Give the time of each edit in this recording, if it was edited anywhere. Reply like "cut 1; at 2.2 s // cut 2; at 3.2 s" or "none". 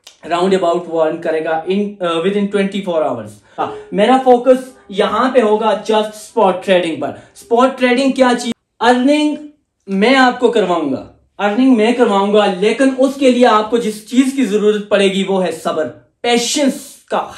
cut 1; at 3.6 s // cut 2; at 8.5 s